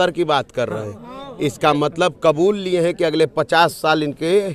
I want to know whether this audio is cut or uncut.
uncut